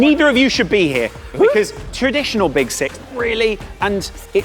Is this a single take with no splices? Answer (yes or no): no